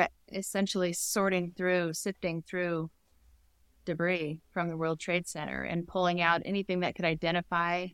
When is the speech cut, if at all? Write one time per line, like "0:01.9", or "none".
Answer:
none